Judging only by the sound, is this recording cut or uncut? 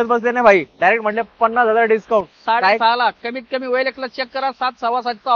uncut